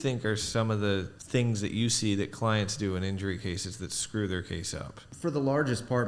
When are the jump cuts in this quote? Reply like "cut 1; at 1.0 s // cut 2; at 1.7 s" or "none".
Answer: cut 1; at 1.2 s // cut 2; at 5.0 s